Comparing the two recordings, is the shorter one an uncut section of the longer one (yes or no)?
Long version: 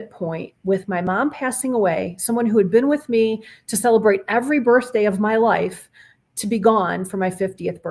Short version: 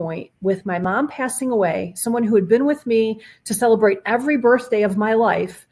yes